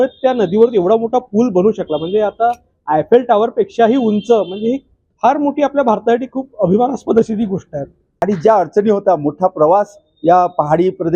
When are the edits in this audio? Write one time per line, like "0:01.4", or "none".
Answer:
0:08.2